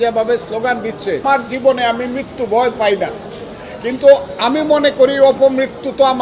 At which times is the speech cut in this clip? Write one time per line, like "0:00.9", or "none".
0:01.2